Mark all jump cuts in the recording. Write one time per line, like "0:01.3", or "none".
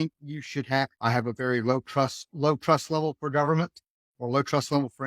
0:00.9